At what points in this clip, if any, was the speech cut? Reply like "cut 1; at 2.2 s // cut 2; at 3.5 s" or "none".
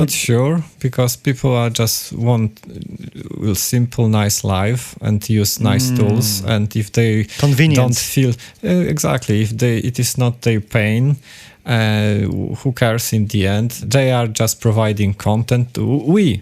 none